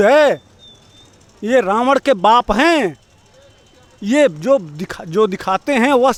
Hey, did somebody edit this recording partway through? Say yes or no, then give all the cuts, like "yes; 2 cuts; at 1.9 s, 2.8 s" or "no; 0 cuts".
no; 0 cuts